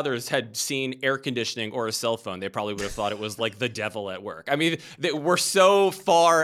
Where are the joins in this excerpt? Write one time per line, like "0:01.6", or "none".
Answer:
none

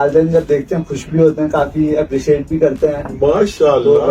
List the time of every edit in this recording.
none

